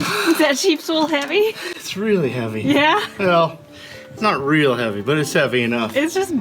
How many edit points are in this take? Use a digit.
0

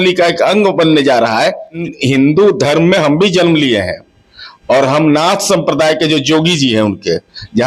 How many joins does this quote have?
1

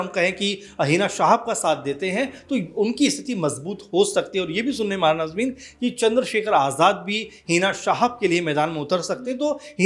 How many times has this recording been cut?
0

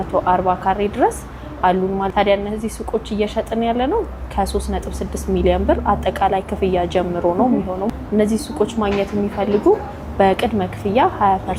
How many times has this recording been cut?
0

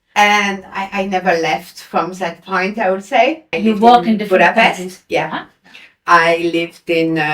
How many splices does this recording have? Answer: 1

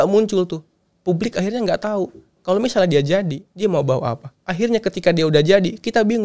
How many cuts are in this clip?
0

